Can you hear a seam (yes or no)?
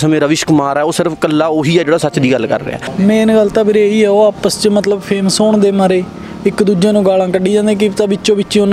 yes